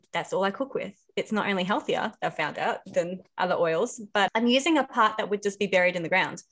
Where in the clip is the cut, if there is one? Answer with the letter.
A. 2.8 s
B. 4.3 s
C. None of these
B